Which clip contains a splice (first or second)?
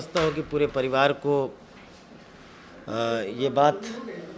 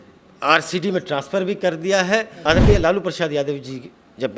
second